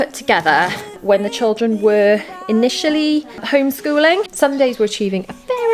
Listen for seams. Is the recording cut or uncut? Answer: cut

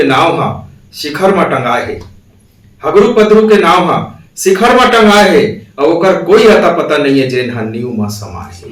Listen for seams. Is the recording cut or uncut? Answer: uncut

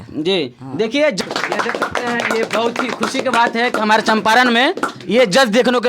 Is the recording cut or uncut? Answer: cut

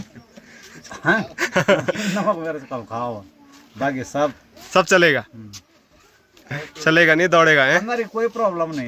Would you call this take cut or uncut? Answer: uncut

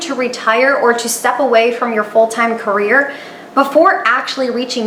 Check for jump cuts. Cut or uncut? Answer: uncut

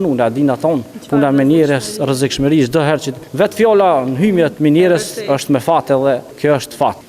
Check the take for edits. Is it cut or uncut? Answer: cut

